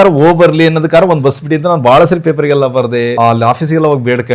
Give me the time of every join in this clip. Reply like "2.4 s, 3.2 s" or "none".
3.1 s

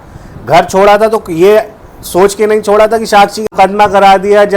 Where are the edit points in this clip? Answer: 3.5 s

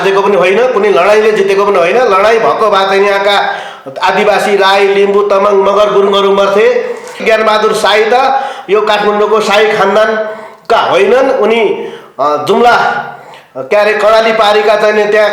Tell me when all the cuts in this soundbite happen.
7.2 s

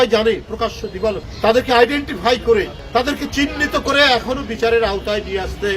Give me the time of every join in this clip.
1.3 s, 2.8 s

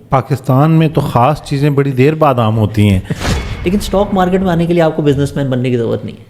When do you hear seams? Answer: 3.4 s

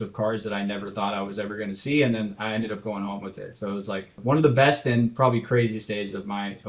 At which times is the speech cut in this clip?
4.1 s

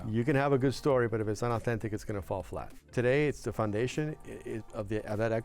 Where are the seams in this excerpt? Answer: 2.9 s

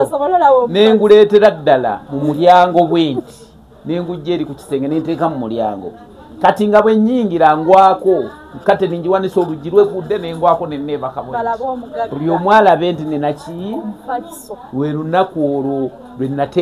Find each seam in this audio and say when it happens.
none

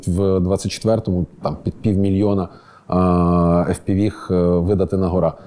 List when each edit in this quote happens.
none

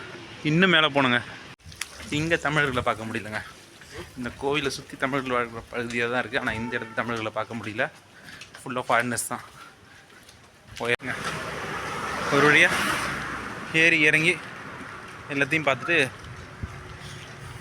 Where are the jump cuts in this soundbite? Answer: 2.0 s, 10.9 s

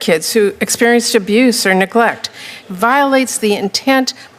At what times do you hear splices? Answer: 2.5 s

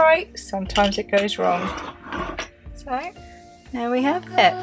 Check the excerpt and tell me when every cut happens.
none

